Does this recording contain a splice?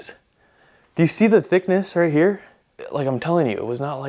yes; 1 cut; at 2.8 s

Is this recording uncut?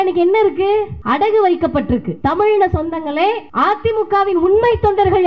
no; 3 cuts; at 1.0 s, 2.1 s, 3.5 s

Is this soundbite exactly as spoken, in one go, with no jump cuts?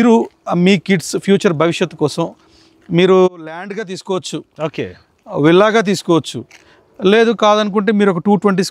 yes; 0 cuts

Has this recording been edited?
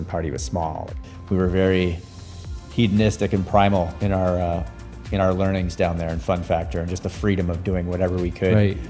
yes; 1 cut; at 1.0 s

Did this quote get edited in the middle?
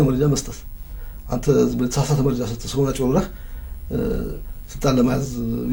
no; 0 cuts

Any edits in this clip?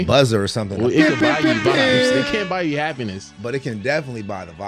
no; 0 cuts

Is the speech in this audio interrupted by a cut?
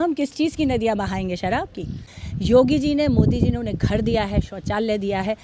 yes; 1 cut; at 2.1 s

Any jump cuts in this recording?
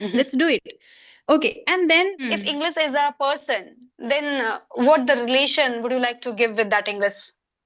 yes; 1 cut; at 2.3 s

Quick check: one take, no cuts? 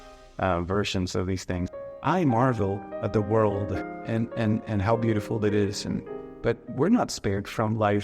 no; 2 cuts; at 1.7 s, 3.8 s

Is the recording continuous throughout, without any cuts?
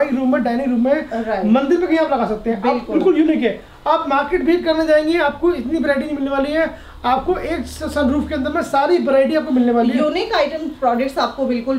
yes; 0 cuts

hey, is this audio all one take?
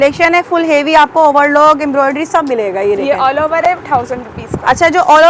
yes; 0 cuts

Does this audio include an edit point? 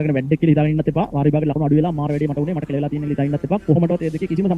no; 0 cuts

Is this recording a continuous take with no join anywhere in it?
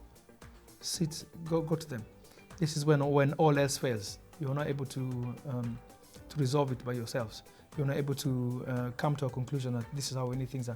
yes; 0 cuts

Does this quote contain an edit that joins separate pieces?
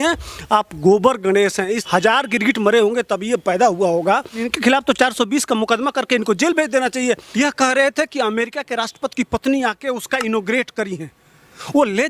yes; 3 cuts; at 1.8 s, 4.5 s, 7.3 s

